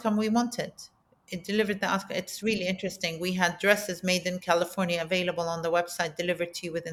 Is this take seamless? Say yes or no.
yes